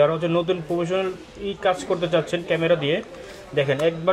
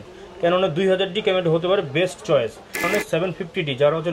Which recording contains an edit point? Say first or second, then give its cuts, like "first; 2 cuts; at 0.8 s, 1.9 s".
second; 1 cut; at 2.9 s